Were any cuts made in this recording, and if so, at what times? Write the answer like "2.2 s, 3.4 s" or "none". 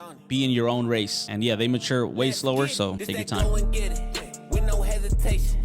1.2 s, 3.0 s